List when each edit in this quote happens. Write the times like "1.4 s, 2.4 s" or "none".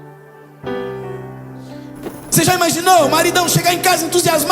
2.2 s